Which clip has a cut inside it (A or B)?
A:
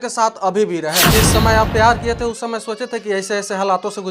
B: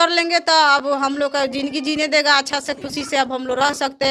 A